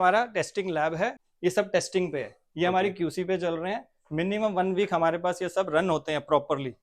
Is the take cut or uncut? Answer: cut